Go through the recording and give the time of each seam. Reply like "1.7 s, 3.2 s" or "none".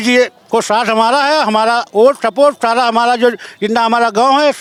none